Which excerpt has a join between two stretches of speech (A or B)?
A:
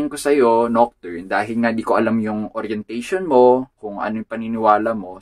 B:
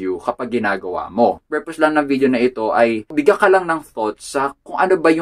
B